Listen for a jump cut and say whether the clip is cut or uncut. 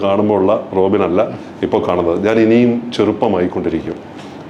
uncut